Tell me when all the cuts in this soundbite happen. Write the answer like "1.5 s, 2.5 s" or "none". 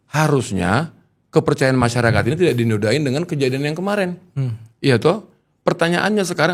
none